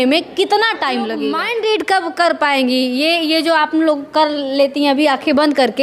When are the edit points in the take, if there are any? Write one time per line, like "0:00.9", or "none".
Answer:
0:01.4